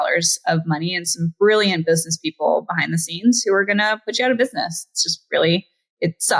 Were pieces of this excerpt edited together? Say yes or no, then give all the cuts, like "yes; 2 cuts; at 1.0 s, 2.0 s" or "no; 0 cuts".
no; 0 cuts